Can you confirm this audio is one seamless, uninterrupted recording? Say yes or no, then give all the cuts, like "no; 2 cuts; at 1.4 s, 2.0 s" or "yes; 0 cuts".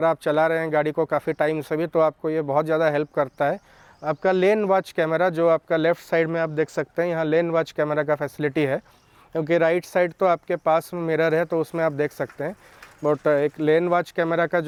yes; 0 cuts